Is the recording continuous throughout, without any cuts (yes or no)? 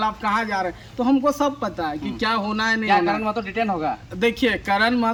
yes